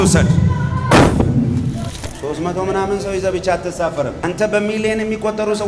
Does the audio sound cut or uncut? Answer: cut